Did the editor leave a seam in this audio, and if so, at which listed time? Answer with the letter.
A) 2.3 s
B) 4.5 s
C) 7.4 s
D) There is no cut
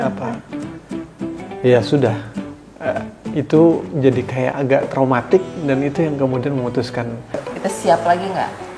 C